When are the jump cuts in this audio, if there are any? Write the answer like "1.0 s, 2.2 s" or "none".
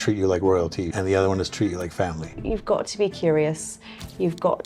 0.9 s, 2.4 s